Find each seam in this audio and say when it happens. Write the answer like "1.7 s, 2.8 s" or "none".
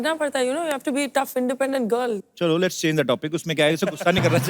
2.2 s